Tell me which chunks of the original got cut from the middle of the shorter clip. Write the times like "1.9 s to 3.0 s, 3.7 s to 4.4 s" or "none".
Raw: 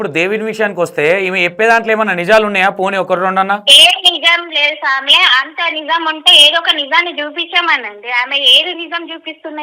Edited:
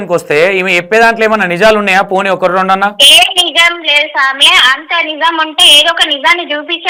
none